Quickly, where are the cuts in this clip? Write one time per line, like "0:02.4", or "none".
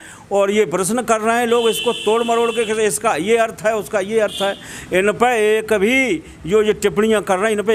none